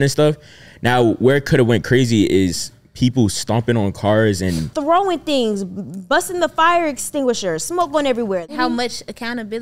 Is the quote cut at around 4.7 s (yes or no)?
yes